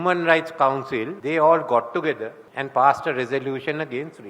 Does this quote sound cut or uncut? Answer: cut